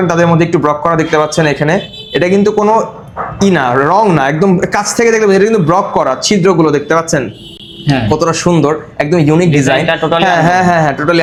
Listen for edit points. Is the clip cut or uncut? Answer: uncut